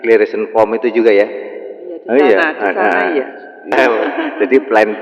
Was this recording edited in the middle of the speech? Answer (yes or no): yes